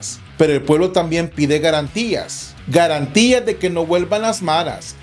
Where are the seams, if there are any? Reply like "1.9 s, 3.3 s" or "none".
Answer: none